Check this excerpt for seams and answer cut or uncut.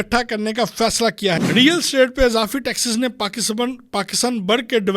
cut